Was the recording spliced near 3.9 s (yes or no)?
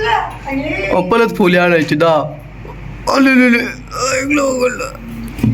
no